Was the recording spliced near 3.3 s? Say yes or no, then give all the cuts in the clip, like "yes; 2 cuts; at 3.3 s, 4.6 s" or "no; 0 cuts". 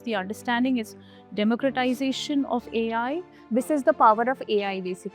yes; 1 cut; at 3.3 s